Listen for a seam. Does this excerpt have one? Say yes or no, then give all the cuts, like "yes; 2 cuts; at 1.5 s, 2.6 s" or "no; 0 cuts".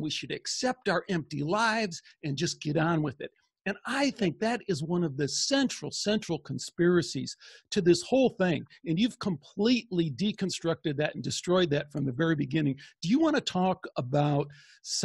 no; 0 cuts